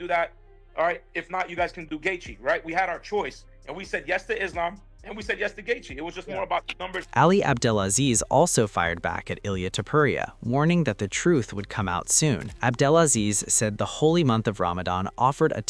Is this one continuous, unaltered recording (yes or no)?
yes